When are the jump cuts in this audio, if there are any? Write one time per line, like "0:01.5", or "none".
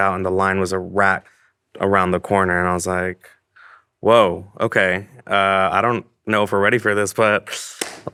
none